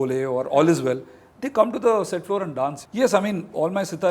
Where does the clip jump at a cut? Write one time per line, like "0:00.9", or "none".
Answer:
0:02.8